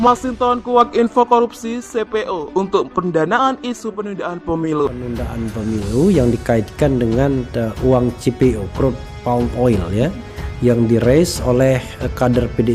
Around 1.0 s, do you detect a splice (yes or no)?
no